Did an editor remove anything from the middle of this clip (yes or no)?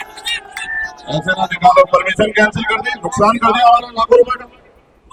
no